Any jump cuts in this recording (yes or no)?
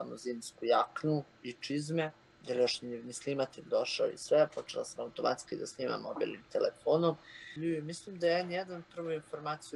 yes